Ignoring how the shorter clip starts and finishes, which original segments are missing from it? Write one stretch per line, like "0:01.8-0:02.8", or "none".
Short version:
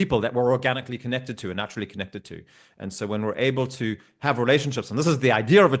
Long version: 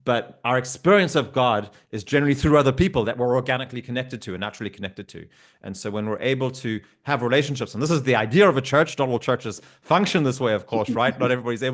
none